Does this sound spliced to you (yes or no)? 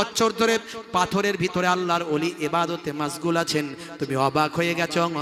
no